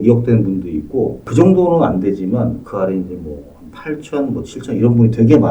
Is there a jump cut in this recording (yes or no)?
no